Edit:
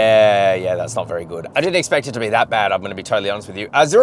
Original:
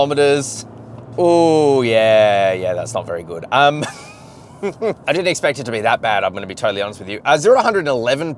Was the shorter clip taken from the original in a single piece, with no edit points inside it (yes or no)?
no